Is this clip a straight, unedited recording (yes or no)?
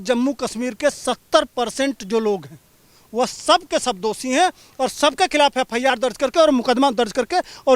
yes